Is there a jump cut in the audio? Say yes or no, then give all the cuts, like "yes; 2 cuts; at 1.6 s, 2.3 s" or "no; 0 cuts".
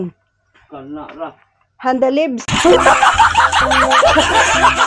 yes; 1 cut; at 2.4 s